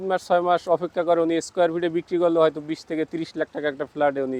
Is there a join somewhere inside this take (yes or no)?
no